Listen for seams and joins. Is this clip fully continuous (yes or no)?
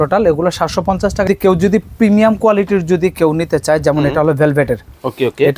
no